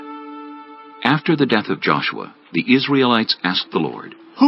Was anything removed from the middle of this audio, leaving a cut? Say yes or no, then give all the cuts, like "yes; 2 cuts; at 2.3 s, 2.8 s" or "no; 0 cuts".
yes; 1 cut; at 3.3 s